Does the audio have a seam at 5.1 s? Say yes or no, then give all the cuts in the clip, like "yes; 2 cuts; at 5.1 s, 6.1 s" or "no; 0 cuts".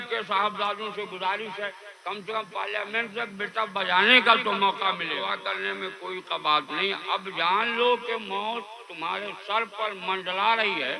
yes; 1 cut; at 5.1 s